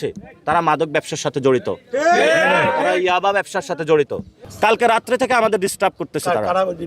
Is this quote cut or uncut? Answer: cut